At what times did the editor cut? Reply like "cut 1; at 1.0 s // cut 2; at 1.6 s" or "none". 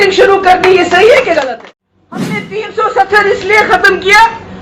cut 1; at 1.3 s